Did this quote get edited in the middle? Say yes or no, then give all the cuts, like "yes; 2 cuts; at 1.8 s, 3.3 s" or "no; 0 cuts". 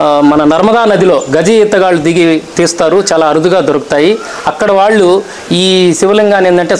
no; 0 cuts